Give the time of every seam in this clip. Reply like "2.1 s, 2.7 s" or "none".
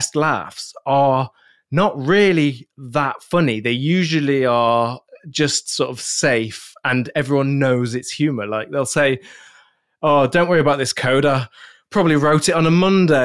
none